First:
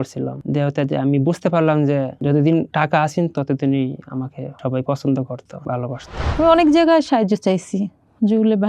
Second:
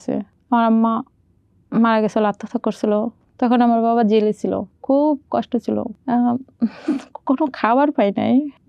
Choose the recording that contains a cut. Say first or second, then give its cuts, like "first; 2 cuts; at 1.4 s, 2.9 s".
first; 1 cut; at 6.3 s